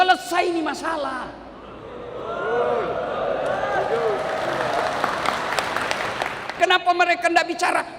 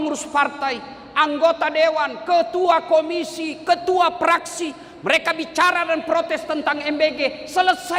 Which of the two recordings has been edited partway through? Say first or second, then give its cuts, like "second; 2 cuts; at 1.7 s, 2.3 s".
first; 1 cut; at 6.4 s